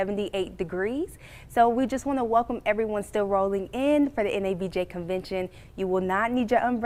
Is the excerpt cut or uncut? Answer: uncut